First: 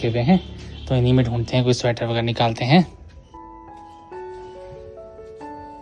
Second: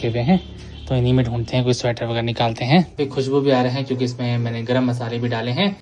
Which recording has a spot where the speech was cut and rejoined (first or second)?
second